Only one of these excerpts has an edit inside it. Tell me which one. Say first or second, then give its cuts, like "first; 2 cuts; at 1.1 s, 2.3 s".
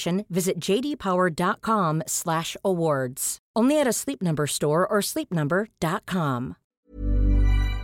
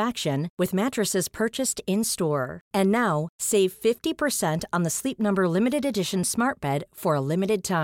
first; 1 cut; at 6.6 s